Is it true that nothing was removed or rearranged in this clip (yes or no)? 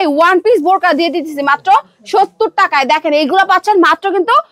yes